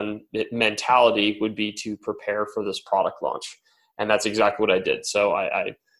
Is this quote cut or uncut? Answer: uncut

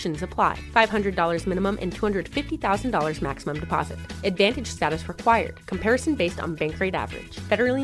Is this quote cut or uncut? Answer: uncut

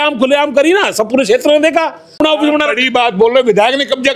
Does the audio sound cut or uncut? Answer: cut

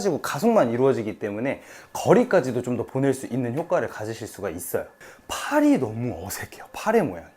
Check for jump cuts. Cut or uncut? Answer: cut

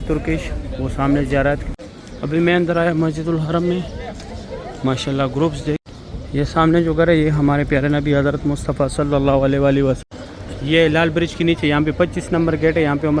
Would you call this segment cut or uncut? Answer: cut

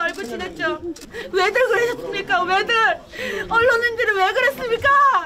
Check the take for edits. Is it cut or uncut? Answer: cut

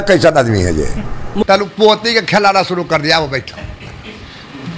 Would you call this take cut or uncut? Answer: cut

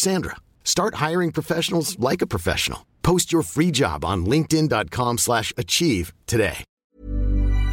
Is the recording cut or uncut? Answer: cut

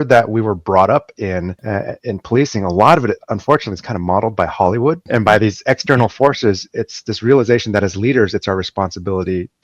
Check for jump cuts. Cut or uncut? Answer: cut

